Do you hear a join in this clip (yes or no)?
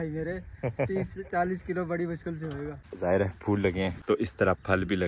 yes